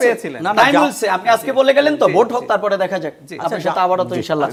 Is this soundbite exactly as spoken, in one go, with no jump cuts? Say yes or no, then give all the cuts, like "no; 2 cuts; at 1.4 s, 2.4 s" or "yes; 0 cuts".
yes; 0 cuts